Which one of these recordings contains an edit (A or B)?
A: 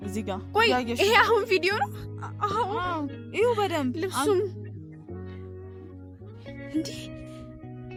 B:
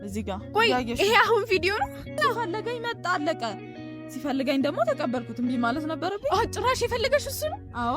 B